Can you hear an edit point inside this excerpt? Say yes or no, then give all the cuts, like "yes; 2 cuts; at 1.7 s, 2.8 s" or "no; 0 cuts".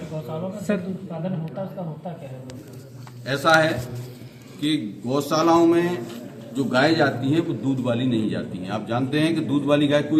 no; 0 cuts